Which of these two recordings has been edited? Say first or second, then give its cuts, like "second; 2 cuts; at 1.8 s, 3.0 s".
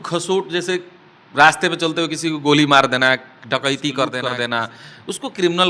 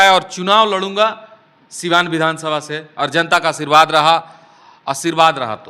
first; 1 cut; at 4.2 s